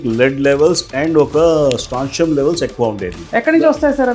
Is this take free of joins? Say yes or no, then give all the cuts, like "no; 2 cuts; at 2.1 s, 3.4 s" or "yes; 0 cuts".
no; 1 cut; at 3.2 s